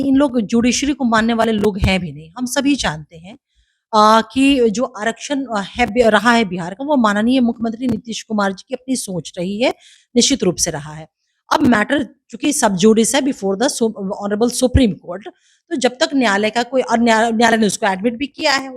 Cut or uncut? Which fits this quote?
cut